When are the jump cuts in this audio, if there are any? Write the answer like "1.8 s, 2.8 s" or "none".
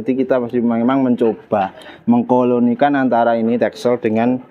none